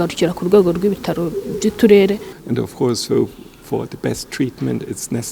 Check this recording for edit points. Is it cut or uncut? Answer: cut